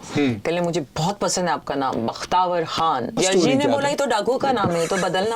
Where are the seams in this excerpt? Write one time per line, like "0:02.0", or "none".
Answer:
0:03.2